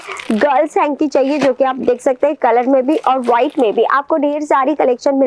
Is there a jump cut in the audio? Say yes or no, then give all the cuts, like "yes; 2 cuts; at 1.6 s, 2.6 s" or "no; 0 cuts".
no; 0 cuts